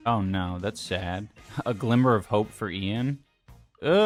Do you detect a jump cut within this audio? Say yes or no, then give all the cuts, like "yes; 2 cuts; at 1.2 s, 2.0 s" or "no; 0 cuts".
no; 0 cuts